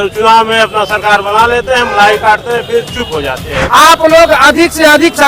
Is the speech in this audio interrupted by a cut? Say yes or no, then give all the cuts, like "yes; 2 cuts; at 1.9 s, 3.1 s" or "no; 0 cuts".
yes; 1 cut; at 3.5 s